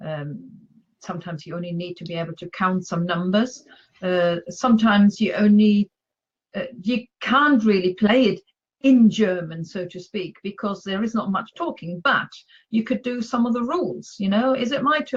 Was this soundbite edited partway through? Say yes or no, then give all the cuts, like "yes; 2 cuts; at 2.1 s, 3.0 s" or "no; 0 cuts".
yes; 1 cut; at 5.3 s